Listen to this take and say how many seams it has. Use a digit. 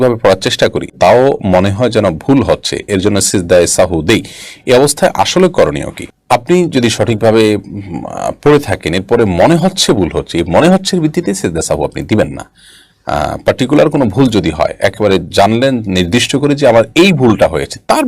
0